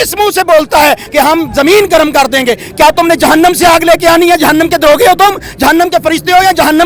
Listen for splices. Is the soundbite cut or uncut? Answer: cut